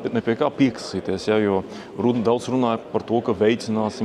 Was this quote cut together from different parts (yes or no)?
no